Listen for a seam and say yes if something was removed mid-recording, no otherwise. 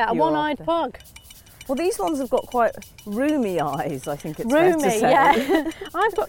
yes